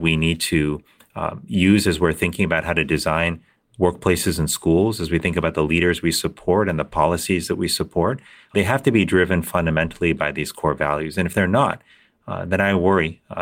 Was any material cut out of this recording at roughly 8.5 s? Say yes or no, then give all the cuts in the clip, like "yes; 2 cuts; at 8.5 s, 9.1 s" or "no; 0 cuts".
yes; 1 cut; at 8.5 s